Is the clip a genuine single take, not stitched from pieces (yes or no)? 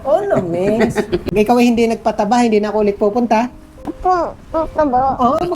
no